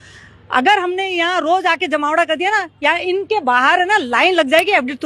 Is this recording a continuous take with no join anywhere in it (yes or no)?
yes